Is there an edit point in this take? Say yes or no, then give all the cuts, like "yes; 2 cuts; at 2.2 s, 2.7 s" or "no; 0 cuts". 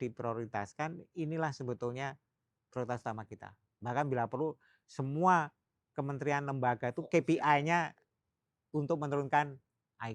no; 0 cuts